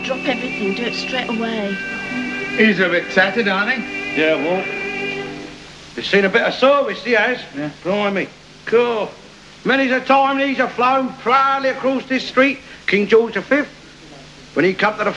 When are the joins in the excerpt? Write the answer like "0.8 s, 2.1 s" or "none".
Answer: none